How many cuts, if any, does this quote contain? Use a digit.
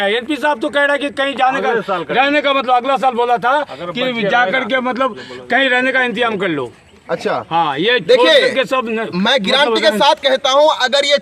0